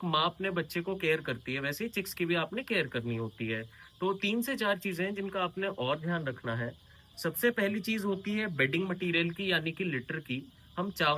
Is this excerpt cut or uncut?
uncut